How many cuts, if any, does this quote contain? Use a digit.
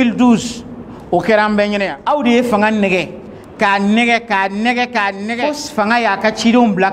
2